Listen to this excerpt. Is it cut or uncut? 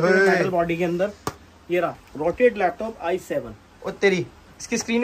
cut